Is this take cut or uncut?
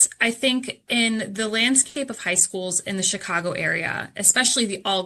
uncut